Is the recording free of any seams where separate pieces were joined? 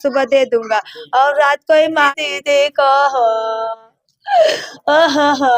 no; 1 cut; at 2.1 s

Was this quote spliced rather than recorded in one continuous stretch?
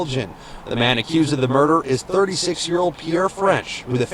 yes; 1 cut; at 3.1 s

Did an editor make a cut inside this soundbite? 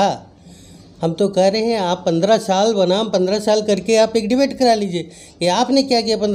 no; 0 cuts

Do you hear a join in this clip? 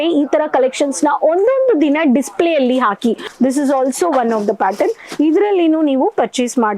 yes; 1 cut; at 3.3 s

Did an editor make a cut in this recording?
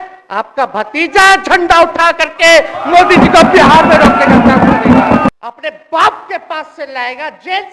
yes; 1 cut; at 5.3 s

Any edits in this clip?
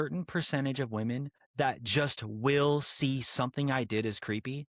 yes; 1 cut; at 1.4 s

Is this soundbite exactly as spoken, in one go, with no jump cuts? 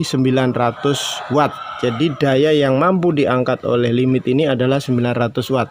yes; 0 cuts

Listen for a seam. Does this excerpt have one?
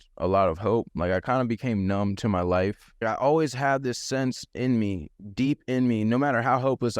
yes; 1 cut; at 3.0 s

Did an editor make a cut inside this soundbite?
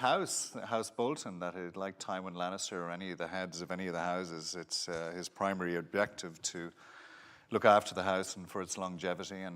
yes; 1 cut; at 6.8 s

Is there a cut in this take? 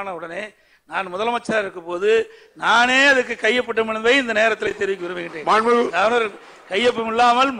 no; 0 cuts

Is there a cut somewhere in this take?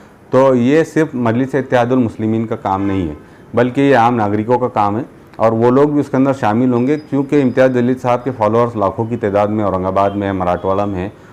no; 0 cuts

